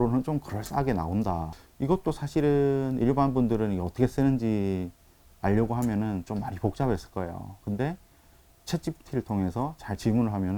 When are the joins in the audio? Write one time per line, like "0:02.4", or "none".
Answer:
0:01.5